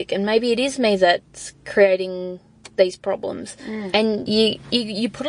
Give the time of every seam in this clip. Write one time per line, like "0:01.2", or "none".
0:03.9